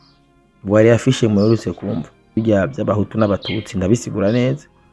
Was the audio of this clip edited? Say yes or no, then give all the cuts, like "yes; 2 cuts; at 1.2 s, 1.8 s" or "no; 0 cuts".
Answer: yes; 1 cut; at 2.3 s